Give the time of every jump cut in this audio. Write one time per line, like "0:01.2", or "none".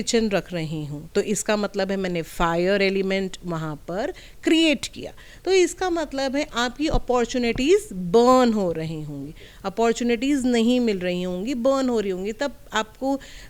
none